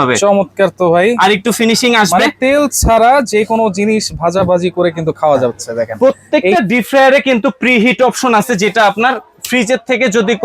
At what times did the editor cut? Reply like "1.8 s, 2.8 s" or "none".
5.9 s